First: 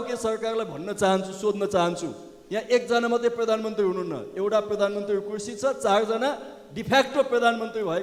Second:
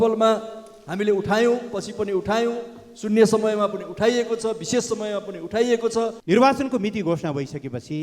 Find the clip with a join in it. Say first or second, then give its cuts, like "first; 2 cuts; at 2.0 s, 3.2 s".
second; 1 cut; at 6.2 s